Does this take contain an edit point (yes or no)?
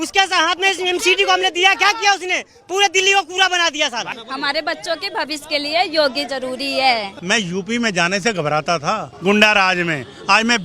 yes